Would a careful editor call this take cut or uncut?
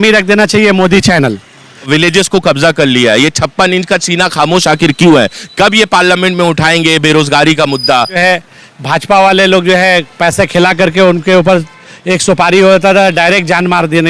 cut